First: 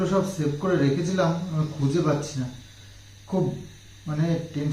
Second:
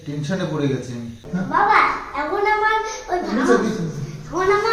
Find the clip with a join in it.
second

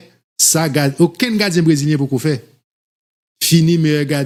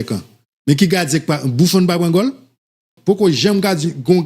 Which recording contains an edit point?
second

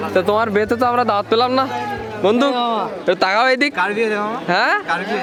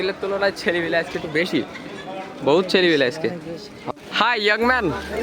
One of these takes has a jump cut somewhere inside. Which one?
second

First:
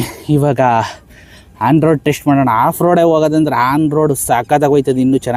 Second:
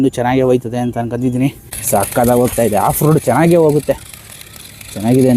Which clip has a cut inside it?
second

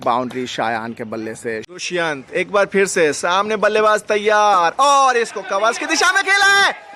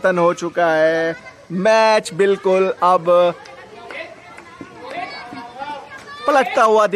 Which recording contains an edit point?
first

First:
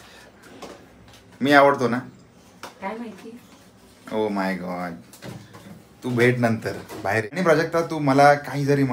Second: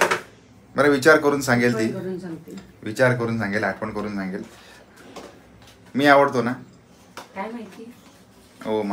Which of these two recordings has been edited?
first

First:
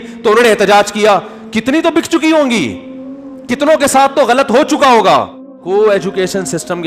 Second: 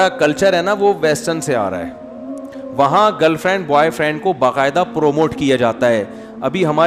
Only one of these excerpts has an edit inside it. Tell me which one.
first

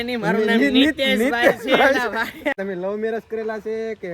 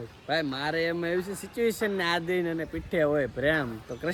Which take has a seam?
first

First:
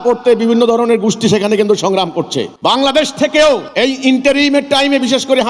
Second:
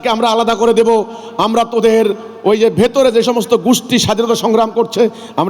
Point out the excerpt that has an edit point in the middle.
first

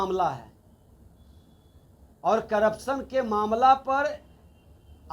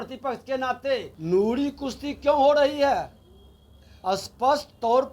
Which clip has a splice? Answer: second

